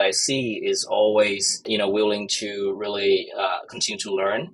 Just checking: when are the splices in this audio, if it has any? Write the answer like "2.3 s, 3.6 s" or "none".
none